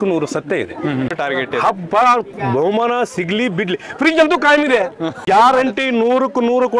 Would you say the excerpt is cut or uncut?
cut